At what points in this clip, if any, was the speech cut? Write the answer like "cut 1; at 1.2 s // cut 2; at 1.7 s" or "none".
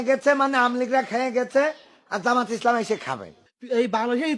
cut 1; at 3.2 s